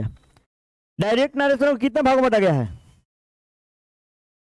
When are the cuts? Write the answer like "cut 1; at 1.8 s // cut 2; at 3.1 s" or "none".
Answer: none